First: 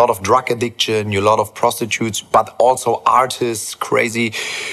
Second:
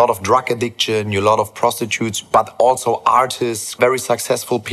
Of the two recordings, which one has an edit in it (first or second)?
second